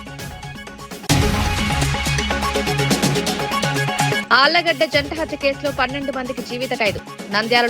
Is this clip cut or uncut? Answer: cut